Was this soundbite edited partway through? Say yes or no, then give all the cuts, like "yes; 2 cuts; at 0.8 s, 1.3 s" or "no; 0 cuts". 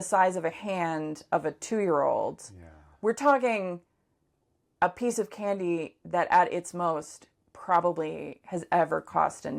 no; 0 cuts